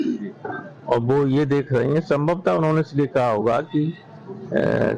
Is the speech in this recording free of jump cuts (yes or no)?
no